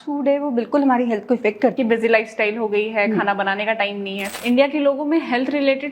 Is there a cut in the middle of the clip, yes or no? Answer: yes